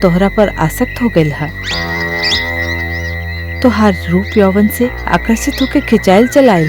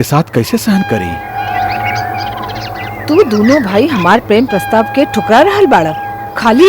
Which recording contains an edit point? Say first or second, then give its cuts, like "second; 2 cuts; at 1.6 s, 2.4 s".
second; 1 cut; at 1.4 s